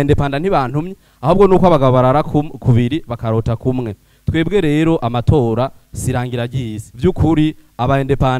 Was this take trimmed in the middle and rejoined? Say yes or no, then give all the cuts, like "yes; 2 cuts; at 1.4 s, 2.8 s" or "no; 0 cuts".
yes; 1 cut; at 6.8 s